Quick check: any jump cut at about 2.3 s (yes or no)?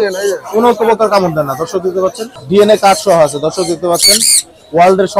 yes